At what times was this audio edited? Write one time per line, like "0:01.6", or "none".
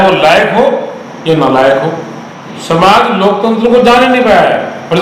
0:02.5